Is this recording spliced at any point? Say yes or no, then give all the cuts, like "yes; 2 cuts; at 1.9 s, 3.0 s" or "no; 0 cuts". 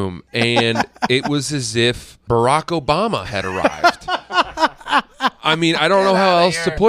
yes; 1 cut; at 2.1 s